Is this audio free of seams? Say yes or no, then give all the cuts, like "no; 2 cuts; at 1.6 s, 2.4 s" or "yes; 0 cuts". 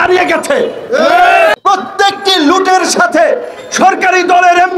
no; 1 cut; at 1.6 s